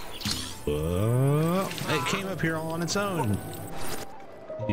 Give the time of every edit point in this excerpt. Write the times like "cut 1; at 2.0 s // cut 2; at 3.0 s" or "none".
none